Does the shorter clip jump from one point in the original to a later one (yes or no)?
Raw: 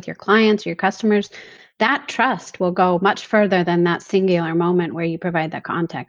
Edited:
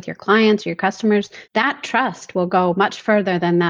yes